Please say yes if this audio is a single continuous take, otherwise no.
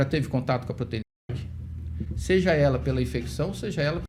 yes